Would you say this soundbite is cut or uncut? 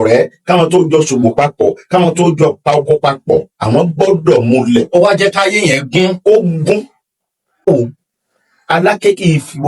cut